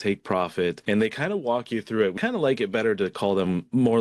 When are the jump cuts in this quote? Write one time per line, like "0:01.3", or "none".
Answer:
0:00.8
0:02.2